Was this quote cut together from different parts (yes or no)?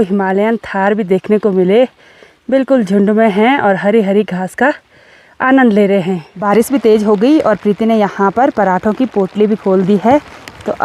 no